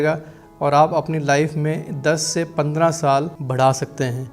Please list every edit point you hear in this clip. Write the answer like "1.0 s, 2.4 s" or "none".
3.4 s